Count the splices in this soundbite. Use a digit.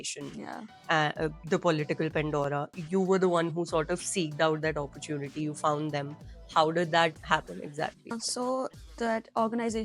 1